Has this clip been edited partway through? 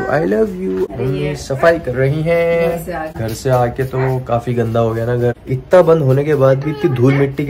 yes; 3 cuts; at 0.9 s, 3.1 s, 5.4 s

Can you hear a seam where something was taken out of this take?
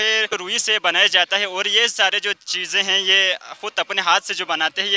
no; 0 cuts

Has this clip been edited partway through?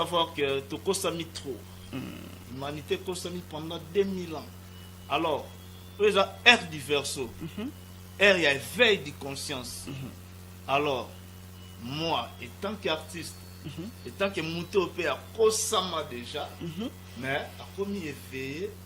no; 0 cuts

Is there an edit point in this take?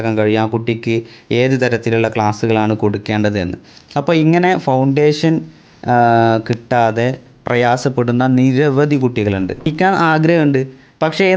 yes; 1 cut; at 9.7 s

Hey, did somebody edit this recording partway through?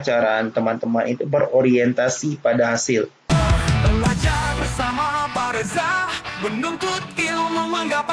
yes; 1 cut; at 3.2 s

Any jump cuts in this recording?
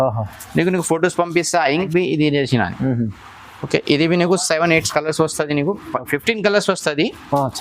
yes; 1 cut; at 1.9 s

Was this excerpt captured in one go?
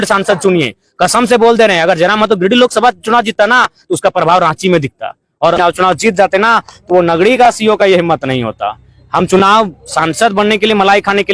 no; 1 cut; at 5.6 s

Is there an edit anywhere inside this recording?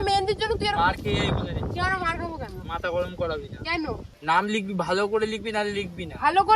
yes; 1 cut; at 4.1 s

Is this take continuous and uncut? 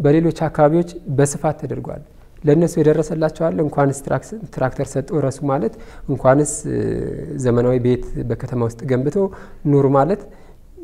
yes; 0 cuts

